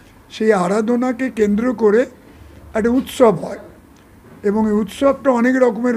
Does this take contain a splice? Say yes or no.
no